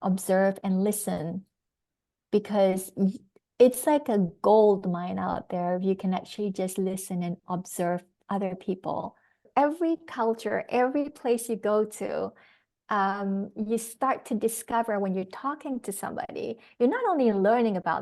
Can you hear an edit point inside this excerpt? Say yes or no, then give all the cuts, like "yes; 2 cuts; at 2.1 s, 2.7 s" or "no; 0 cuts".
yes; 1 cut; at 9.5 s